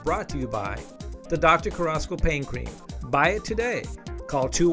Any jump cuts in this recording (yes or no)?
no